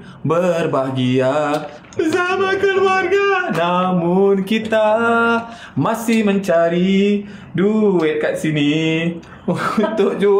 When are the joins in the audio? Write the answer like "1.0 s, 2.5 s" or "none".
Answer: none

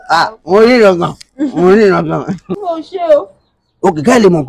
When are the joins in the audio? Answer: 2.5 s

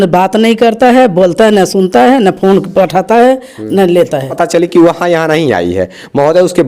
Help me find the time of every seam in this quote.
4.4 s

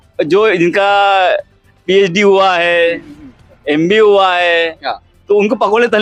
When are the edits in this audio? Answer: none

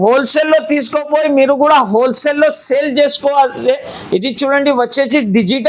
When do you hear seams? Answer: none

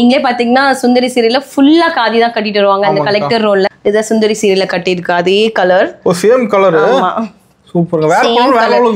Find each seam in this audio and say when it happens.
3.7 s

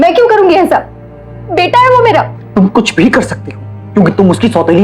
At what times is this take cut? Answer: 2.4 s

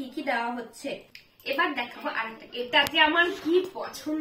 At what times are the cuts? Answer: 1.0 s

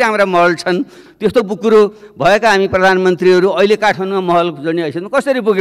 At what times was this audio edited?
1.0 s

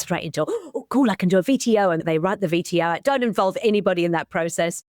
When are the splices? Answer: 2.0 s

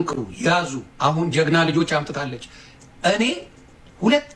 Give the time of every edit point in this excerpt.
none

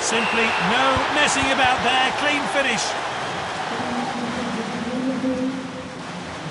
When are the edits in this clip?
none

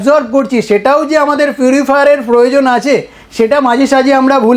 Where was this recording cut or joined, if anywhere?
none

